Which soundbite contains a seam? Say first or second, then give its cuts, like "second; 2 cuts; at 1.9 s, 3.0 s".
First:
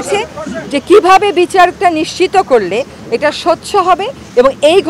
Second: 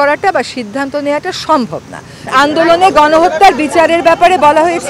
second; 1 cut; at 2.2 s